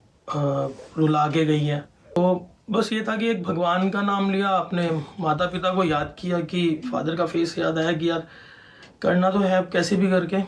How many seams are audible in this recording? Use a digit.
1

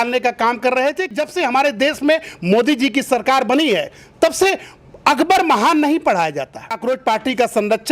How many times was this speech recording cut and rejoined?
2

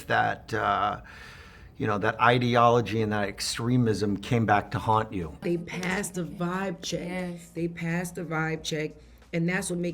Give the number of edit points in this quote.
1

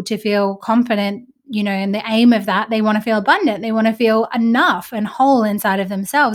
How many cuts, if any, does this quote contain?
0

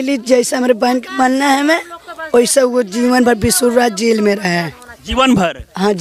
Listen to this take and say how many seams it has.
0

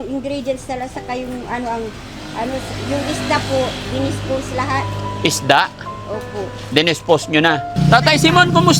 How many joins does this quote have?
1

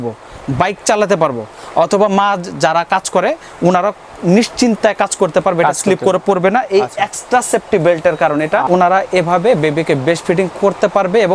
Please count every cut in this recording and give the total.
1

